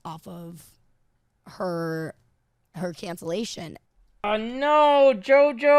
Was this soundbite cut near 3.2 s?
no; 0 cuts

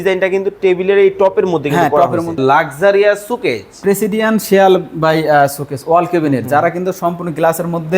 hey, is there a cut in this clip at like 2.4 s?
yes; 1 cut; at 2.4 s

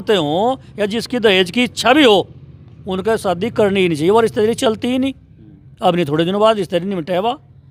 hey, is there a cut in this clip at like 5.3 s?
no; 0 cuts

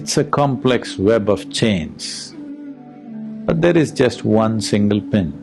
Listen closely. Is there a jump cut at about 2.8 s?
yes; 1 cut; at 2.8 s

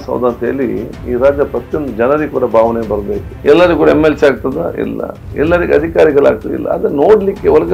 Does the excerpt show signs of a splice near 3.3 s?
yes; 1 cut; at 3.3 s

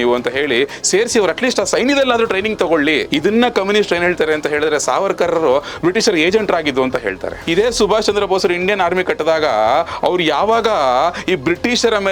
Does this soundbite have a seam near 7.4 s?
yes; 2 cuts; at 3.1 s, 7.4 s

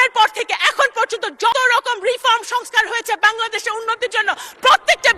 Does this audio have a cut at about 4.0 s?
no; 1 cut; at 1.5 s

